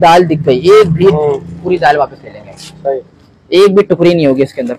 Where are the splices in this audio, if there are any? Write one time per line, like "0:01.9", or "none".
none